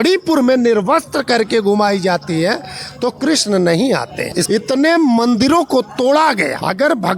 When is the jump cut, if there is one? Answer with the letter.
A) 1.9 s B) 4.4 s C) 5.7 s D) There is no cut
B